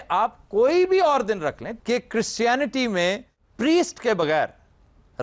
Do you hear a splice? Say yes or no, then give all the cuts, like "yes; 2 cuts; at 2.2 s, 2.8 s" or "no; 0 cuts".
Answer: yes; 1 cut; at 1.7 s